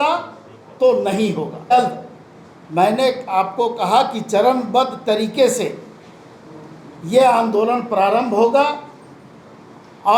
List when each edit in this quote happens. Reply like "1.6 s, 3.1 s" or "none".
none